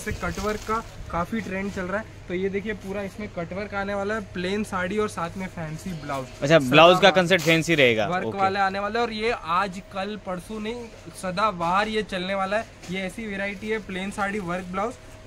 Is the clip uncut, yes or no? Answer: yes